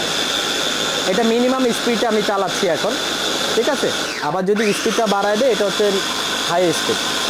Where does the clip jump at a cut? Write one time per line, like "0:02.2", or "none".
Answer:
none